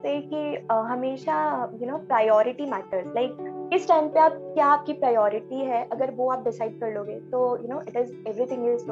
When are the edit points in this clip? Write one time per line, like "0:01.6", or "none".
none